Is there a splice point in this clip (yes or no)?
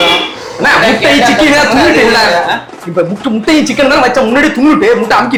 no